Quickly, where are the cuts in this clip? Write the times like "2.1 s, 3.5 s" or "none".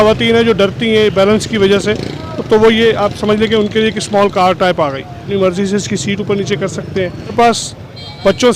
5.2 s, 7.3 s